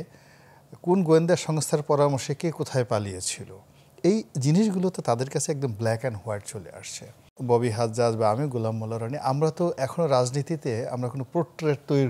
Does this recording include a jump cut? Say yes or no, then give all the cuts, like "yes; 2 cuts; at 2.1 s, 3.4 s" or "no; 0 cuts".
yes; 1 cut; at 7.3 s